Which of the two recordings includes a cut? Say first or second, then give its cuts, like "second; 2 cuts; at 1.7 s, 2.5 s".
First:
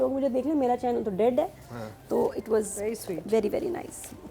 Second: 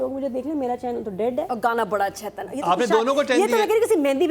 second; 1 cut; at 1.5 s